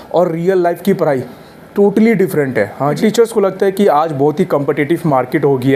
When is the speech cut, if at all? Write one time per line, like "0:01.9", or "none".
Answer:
0:03.0